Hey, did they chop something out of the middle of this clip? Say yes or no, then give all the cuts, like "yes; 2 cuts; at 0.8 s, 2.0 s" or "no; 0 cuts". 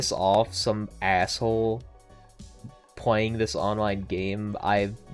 no; 0 cuts